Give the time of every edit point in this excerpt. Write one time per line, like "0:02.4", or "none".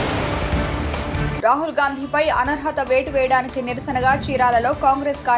0:01.2

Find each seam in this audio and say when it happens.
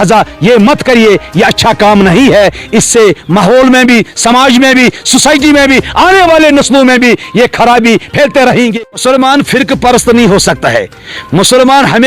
0:09.0

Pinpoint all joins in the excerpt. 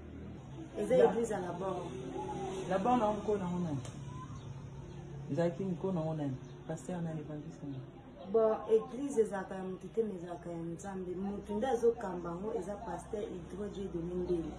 none

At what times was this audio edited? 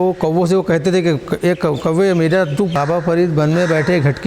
0:02.7

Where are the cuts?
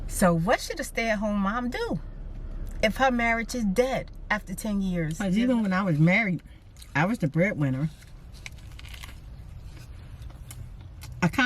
0:05.2

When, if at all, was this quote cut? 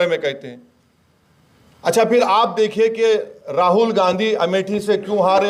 none

